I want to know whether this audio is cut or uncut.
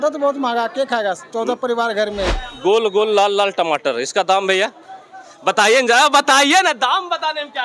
cut